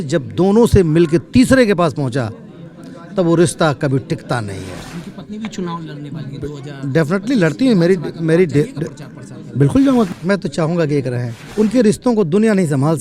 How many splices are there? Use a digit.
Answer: 3